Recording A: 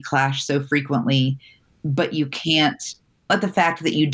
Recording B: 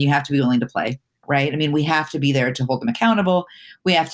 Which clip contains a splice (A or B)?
B